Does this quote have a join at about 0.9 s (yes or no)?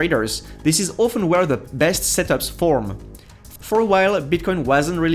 no